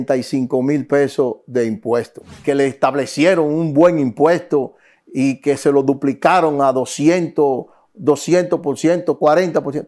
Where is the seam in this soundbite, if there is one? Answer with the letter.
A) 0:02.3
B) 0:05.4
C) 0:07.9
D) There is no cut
A